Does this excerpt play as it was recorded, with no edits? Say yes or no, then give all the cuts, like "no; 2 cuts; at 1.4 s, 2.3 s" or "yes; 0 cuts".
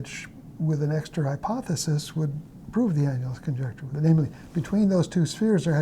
no; 1 cut; at 3.8 s